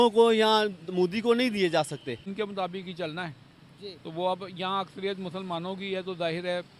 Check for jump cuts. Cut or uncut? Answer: cut